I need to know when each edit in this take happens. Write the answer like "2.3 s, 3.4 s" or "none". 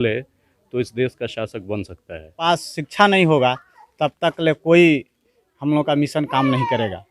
2.4 s